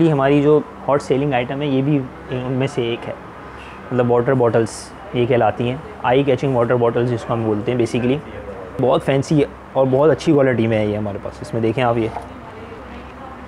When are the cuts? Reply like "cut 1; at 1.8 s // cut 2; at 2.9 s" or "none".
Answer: cut 1; at 8.8 s // cut 2; at 12.8 s